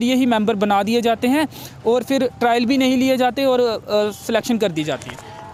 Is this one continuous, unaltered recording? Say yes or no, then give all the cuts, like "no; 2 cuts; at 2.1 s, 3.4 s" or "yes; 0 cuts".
yes; 0 cuts